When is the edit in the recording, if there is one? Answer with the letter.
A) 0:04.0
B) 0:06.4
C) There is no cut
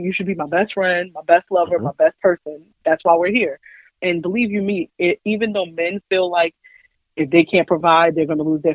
A